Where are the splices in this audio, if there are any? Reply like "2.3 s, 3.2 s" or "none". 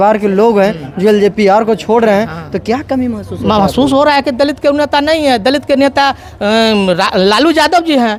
none